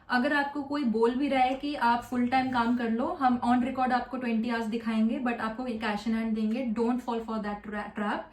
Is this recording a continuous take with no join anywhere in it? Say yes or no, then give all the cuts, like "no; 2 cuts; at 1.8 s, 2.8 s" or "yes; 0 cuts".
yes; 0 cuts